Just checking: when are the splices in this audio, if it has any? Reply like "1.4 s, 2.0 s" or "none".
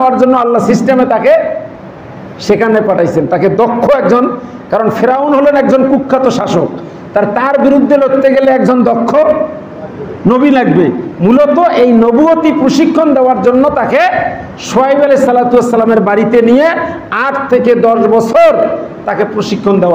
none